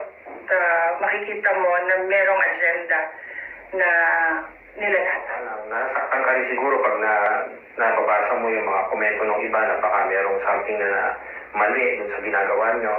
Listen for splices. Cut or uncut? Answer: cut